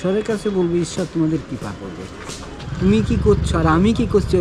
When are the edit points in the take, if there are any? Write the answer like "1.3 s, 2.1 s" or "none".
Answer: 2.7 s